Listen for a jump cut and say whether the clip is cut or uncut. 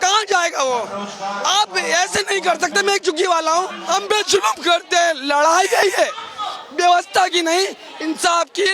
cut